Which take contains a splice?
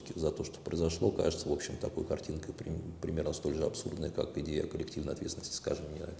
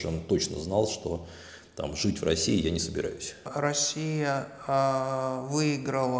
second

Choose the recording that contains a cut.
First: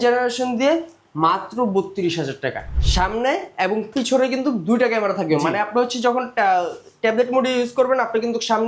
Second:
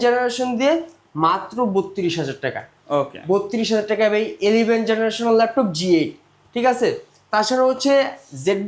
first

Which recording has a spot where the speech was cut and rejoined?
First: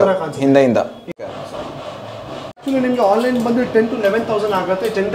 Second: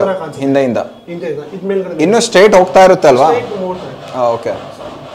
first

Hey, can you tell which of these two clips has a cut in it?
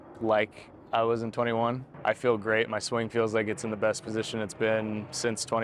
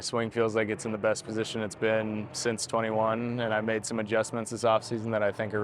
first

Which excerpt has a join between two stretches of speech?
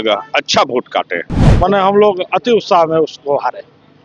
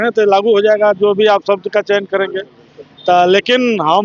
first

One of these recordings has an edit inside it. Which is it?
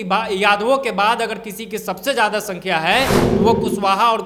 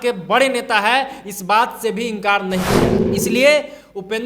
second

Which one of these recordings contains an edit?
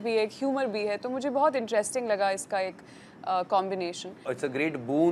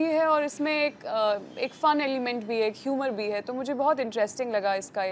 first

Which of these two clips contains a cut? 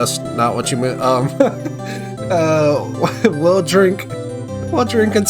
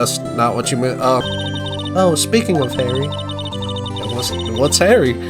second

